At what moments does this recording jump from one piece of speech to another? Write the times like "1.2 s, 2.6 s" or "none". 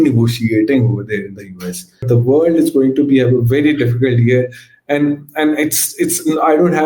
2.0 s